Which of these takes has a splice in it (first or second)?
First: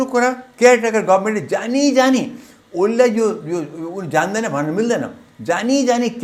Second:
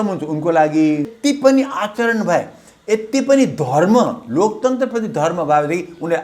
second